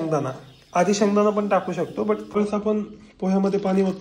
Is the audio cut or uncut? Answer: cut